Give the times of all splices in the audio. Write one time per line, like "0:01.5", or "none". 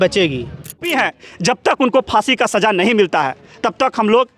0:00.9